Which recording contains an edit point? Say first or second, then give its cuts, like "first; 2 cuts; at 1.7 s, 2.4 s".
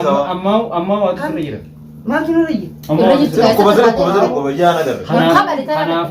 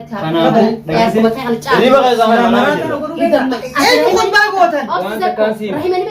second; 1 cut; at 3.6 s